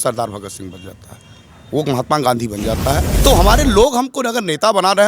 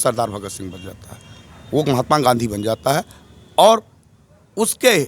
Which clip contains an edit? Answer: first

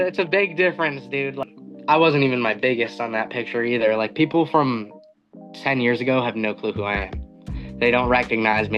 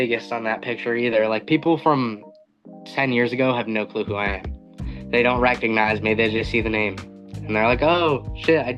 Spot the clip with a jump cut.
first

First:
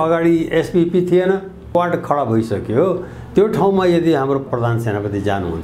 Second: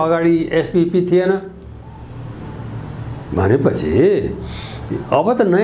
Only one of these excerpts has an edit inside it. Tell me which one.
first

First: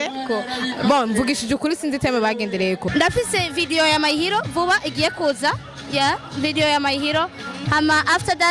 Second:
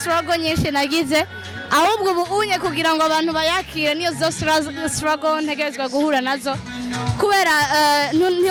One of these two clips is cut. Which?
first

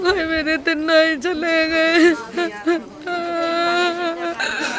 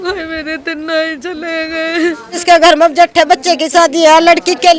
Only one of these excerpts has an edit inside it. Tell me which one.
second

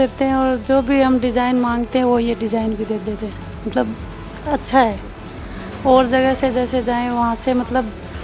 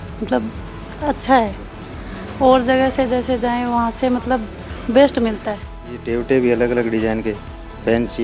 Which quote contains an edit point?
second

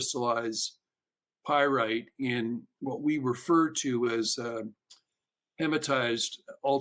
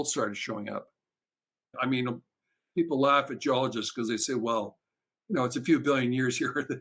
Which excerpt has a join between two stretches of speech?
second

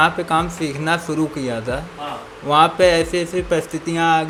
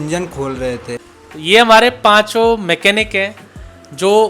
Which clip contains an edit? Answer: second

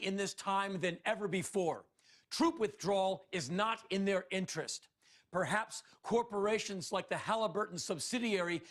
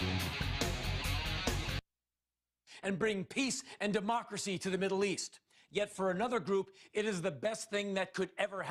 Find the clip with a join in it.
first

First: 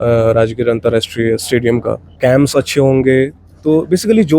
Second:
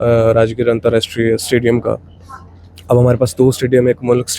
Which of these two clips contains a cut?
first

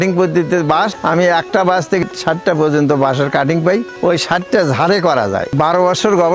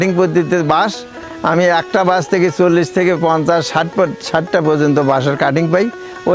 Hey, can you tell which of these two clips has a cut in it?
first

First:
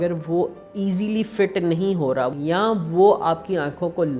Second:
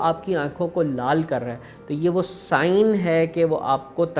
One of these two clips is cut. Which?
first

